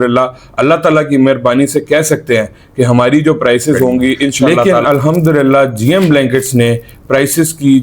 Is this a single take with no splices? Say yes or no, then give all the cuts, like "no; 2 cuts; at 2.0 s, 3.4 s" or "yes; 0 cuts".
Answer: no; 1 cut; at 4.5 s